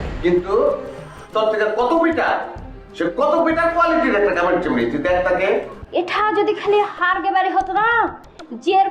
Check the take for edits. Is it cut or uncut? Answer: cut